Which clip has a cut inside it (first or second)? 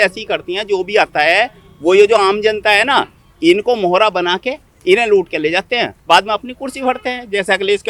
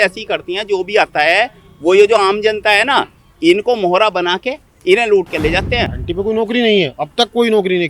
second